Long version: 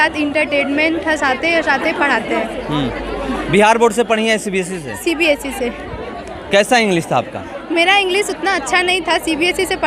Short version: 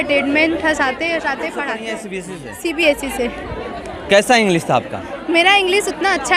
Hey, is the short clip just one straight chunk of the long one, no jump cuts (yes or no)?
no